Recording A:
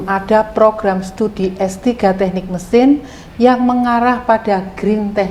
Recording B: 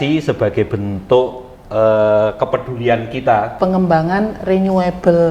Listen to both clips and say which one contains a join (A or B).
B